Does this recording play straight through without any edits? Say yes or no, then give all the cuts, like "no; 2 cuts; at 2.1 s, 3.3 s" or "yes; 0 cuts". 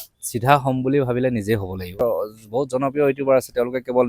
no; 1 cut; at 2.0 s